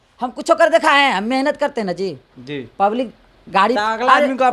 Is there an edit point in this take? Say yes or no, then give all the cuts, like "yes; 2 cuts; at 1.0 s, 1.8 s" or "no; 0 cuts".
no; 0 cuts